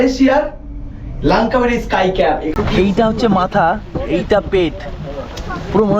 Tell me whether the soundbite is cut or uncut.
cut